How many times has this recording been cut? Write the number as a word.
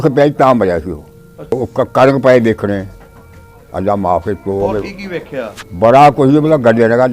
one